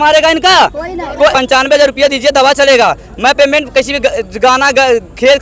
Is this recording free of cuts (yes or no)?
no